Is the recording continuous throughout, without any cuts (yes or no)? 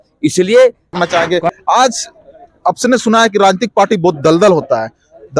no